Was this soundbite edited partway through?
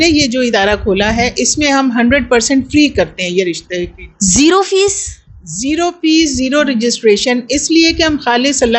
no; 0 cuts

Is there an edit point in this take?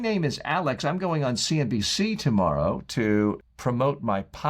yes; 1 cut; at 3.5 s

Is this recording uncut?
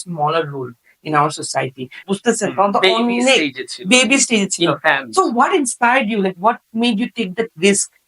no; 1 cut; at 1.9 s

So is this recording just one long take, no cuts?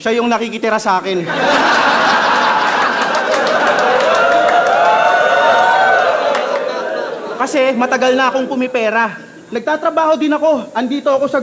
yes; 0 cuts

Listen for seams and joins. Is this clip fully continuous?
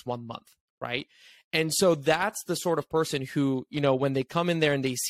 yes; 0 cuts

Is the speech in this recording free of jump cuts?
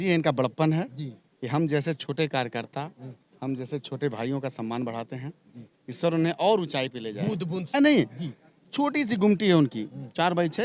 no; 1 cut; at 7.8 s

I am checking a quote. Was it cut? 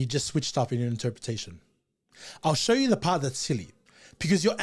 no; 0 cuts

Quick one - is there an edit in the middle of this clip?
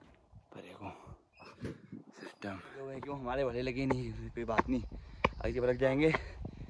yes; 1 cut; at 3.0 s

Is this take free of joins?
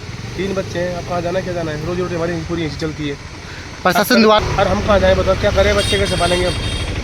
no; 1 cut; at 4.4 s

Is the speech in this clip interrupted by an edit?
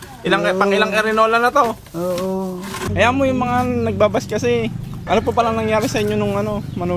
yes; 2 cuts; at 2.7 s, 4.9 s

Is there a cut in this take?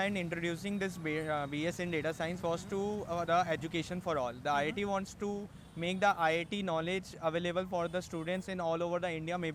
no; 0 cuts

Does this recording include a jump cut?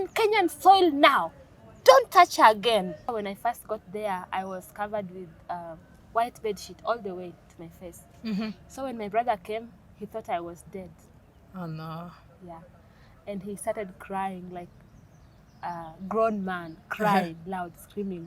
yes; 1 cut; at 3.1 s

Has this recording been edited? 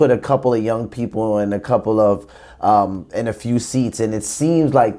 no; 0 cuts

